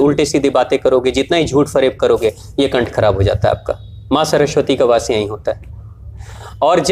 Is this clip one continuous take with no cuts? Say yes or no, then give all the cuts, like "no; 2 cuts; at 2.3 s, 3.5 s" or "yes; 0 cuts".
yes; 0 cuts